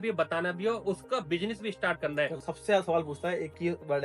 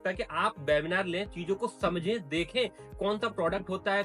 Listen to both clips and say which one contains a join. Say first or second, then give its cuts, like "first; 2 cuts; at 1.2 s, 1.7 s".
first; 1 cut; at 2.4 s